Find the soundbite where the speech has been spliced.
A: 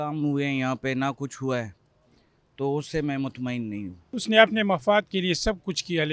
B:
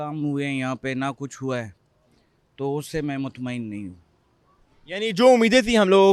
A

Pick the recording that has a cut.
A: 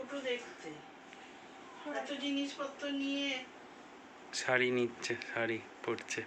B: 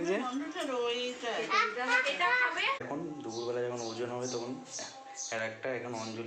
B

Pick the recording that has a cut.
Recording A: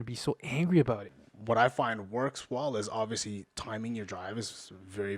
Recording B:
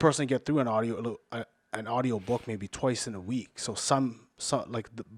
A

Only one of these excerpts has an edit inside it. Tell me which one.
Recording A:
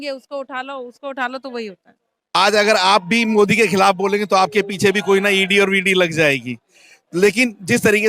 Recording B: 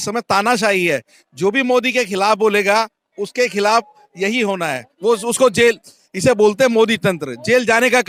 A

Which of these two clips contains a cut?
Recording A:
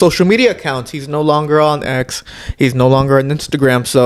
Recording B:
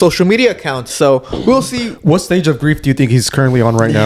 B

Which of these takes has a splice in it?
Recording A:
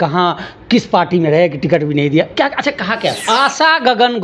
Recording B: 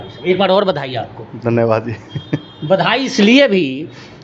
A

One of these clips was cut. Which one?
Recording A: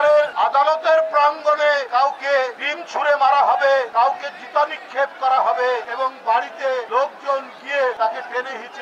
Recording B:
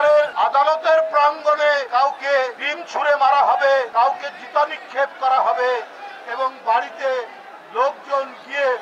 A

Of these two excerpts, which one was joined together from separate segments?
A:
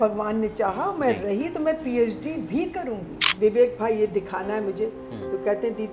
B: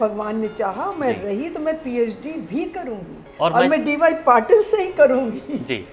A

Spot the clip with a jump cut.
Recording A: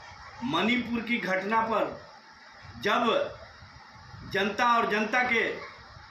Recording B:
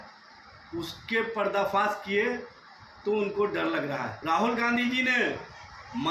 B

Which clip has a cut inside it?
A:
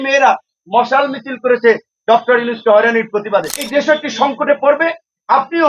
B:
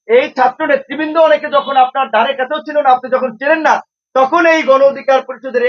A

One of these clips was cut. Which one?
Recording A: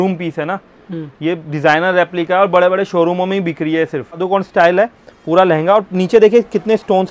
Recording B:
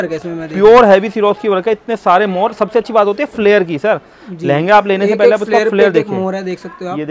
A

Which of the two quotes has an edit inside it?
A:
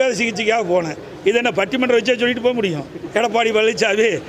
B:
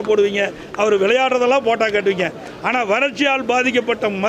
A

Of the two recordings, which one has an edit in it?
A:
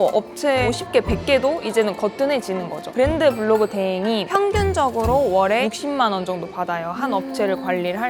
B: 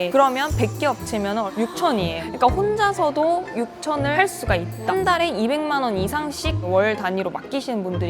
B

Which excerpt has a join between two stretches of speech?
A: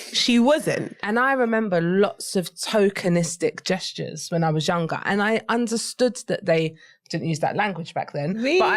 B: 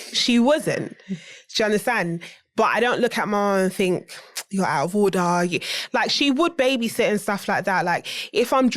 A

